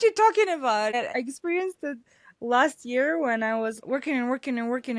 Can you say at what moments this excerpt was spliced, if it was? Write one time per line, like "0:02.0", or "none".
none